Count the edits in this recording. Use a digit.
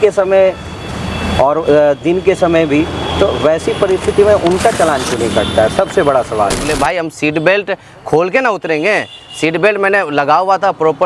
1